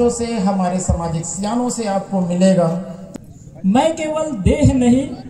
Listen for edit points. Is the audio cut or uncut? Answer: cut